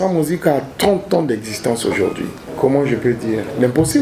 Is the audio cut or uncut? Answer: cut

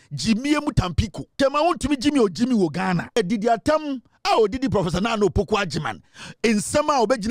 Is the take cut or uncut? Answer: cut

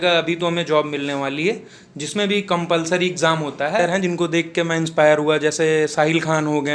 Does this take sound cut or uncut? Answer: cut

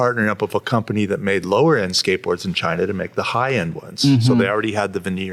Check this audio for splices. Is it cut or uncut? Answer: uncut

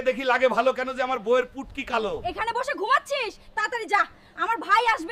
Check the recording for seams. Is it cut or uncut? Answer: uncut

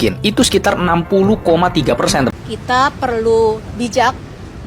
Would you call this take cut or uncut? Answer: cut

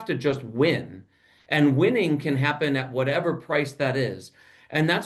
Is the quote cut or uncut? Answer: uncut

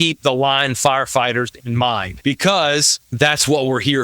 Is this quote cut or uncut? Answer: cut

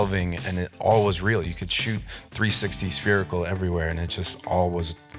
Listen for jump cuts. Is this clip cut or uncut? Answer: uncut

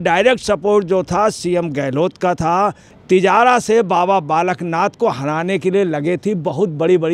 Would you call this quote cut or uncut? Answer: cut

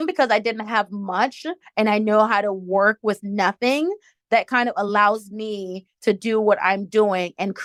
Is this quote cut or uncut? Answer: uncut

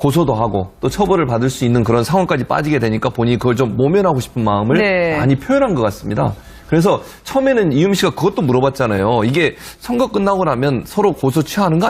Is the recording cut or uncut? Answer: cut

